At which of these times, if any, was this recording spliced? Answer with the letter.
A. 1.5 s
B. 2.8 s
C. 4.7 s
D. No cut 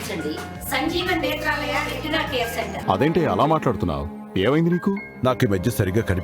B